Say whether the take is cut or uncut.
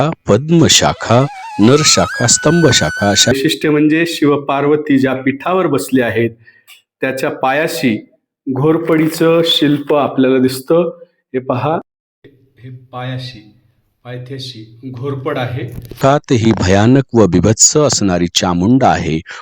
cut